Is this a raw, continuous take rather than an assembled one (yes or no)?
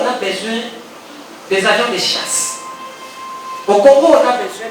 yes